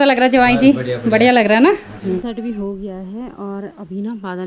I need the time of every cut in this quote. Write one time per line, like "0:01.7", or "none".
0:02.2